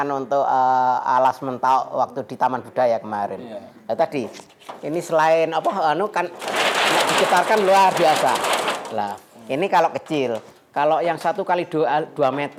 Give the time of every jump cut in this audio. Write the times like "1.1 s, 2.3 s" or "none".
none

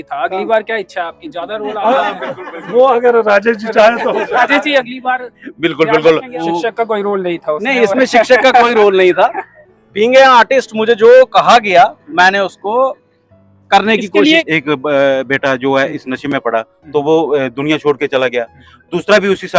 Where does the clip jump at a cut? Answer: 6.4 s, 14.4 s

